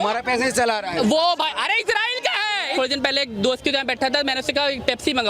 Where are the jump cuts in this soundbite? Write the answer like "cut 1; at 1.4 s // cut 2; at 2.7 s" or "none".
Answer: cut 1; at 2.7 s